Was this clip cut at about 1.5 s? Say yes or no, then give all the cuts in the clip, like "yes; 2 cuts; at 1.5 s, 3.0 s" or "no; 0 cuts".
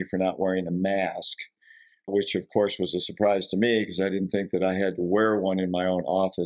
no; 0 cuts